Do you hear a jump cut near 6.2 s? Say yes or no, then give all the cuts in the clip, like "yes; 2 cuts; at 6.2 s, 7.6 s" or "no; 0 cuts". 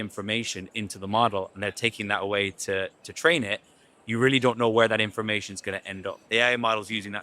yes; 1 cut; at 6.2 s